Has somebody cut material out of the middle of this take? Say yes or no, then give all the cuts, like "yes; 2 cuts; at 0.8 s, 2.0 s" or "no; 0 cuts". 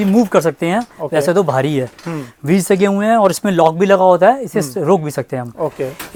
no; 0 cuts